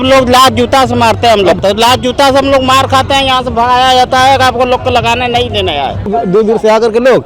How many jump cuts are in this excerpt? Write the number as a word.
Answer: two